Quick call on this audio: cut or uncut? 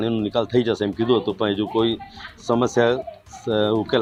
uncut